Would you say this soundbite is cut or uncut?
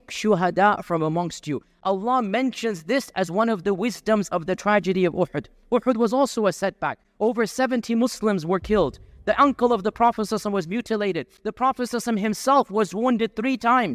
uncut